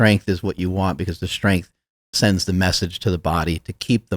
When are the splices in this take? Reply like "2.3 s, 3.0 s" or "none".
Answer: none